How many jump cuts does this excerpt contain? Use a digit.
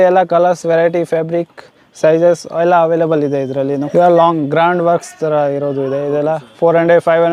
1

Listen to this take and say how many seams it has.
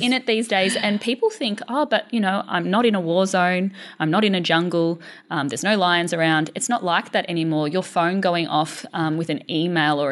0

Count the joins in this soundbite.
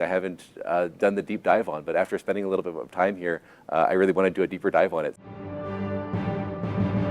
1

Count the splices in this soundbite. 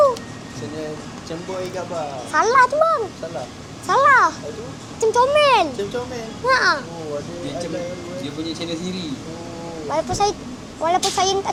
0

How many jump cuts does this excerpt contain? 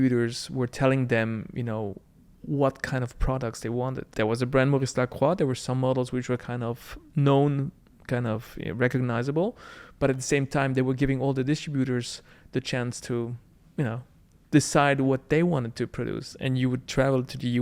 2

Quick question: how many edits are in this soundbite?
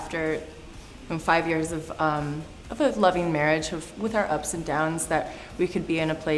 0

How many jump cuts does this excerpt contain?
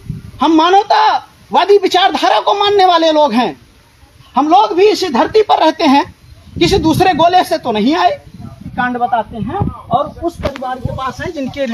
1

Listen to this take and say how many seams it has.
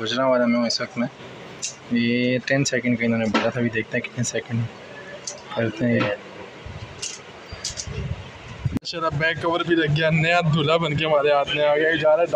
1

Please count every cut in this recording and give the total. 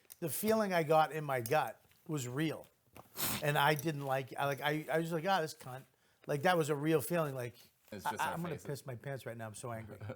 1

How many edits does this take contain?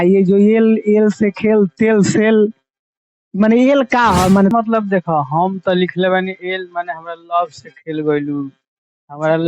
1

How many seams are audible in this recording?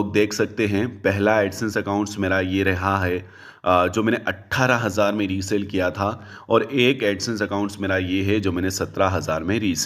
0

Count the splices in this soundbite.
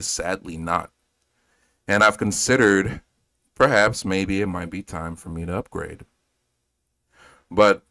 0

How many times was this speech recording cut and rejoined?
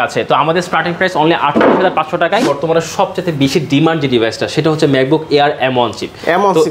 1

